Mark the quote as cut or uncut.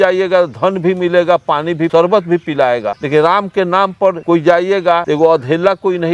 cut